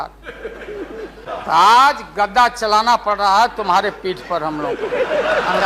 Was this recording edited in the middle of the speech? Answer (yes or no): yes